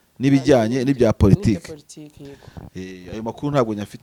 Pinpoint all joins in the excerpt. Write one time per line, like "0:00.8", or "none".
none